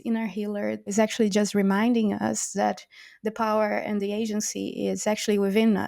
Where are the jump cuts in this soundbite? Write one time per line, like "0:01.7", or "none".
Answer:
0:00.9